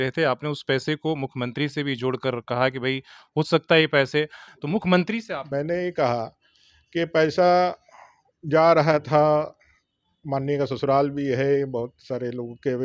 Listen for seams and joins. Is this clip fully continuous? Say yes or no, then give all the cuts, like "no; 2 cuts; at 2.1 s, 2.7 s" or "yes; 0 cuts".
no; 2 cuts; at 4.4 s, 5.4 s